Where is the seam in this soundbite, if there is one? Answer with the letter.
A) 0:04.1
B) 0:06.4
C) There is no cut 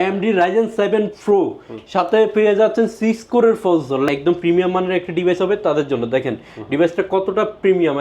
A